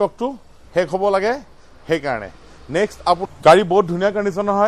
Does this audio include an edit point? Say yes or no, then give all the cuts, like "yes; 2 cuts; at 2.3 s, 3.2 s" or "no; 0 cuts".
yes; 1 cut; at 3.3 s